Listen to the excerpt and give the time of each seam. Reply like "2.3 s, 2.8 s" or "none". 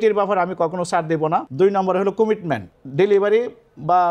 1.5 s, 2.8 s